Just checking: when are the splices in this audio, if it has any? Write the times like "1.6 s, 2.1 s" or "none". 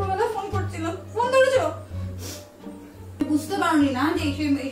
3.2 s